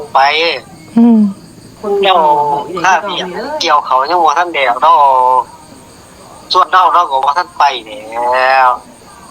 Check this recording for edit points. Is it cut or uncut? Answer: cut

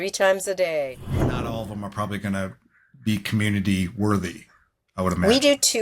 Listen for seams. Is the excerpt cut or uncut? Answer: cut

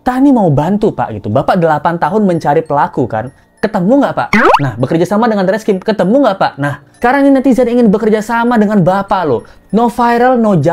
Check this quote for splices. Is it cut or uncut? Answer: uncut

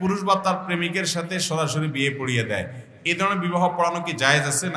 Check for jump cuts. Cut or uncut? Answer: uncut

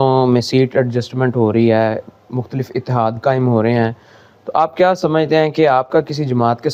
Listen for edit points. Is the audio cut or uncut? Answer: uncut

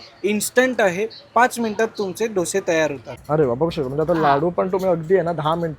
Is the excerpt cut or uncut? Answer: cut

